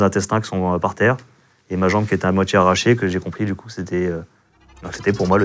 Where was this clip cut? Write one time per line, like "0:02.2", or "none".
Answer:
none